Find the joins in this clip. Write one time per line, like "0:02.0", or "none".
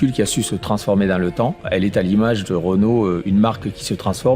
0:01.7